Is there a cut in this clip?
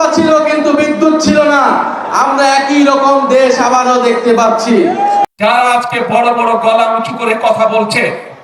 yes; 1 cut; at 5.3 s

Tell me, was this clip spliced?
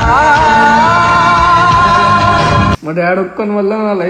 yes; 1 cut; at 2.8 s

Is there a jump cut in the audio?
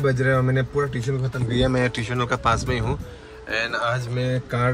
no; 0 cuts

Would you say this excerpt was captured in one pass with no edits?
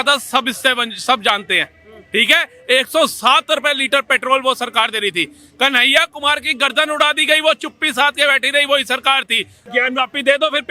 no; 1 cut; at 9.7 s

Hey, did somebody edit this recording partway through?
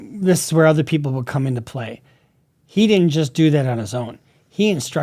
no; 0 cuts

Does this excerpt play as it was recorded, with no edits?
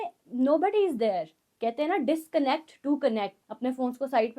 no; 2 cuts; at 1.4 s, 3.4 s

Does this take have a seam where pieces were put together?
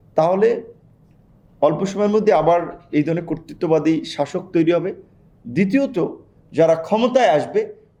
no; 0 cuts

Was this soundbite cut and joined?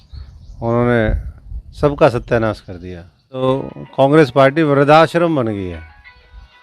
yes; 1 cut; at 3.4 s

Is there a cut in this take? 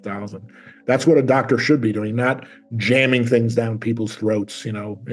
no; 0 cuts

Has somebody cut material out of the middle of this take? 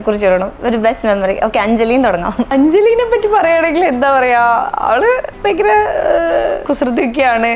yes; 2 cuts; at 2.5 s, 6.6 s

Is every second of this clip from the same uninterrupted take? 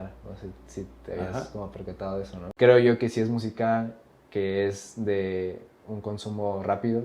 no; 1 cut; at 2.4 s

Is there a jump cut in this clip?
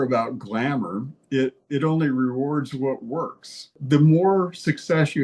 yes; 1 cut; at 3.8 s

